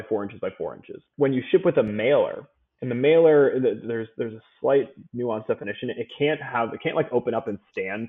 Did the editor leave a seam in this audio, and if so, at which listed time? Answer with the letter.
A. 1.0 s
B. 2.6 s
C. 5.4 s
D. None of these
A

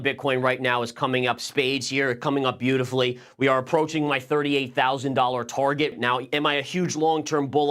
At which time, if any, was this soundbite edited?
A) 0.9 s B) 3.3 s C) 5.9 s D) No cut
C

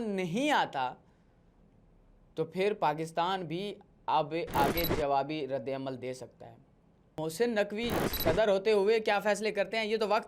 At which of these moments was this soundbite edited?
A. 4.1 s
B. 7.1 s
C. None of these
B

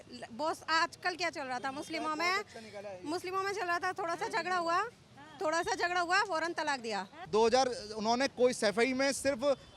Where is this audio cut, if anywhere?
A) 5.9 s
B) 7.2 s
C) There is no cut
B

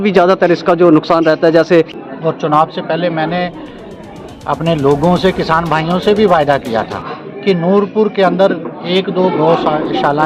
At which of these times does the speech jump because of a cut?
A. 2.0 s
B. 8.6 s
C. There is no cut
A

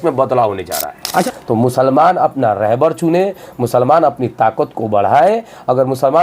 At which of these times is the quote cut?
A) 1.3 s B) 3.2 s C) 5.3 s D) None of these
A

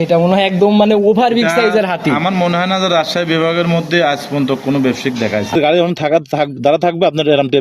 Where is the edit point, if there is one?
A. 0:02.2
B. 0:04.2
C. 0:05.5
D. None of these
C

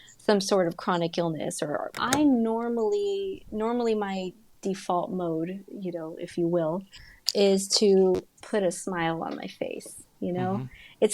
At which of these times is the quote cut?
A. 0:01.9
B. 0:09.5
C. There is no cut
A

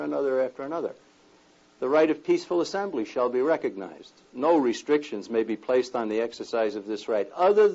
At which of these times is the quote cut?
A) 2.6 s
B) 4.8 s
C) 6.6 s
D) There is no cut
A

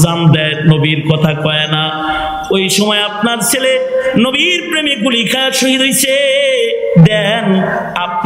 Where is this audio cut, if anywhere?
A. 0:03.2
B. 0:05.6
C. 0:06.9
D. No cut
D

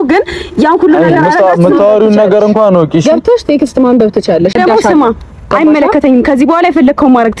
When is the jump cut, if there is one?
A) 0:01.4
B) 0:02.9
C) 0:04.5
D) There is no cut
C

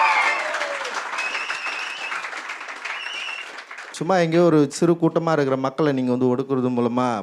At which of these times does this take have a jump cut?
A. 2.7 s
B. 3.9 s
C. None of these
B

